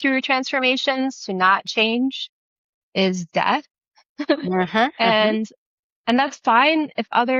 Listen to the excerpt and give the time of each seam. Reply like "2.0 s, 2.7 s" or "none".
none